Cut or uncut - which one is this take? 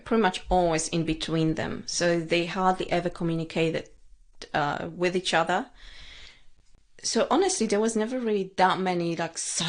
uncut